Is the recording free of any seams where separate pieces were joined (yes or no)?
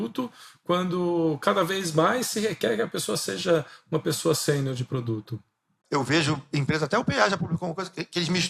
no